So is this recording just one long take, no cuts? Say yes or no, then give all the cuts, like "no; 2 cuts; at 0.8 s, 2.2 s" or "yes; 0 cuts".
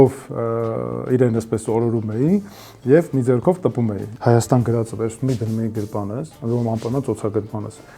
no; 1 cut; at 4.1 s